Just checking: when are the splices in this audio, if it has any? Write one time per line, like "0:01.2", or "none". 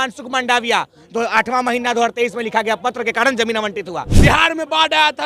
0:04.0